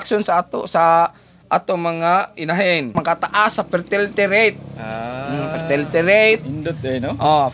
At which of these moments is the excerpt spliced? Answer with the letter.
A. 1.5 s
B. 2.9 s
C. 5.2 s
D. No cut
B